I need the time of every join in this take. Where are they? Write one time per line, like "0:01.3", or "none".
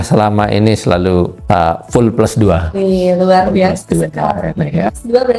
none